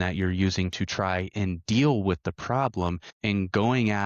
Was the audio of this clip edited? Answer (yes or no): yes